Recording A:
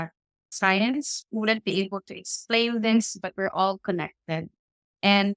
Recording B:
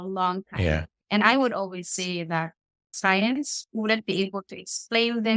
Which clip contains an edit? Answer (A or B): B